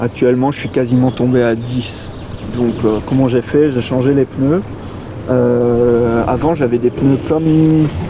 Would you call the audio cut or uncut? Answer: uncut